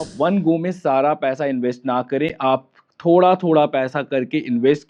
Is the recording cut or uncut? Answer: uncut